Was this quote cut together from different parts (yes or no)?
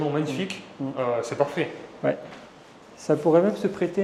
no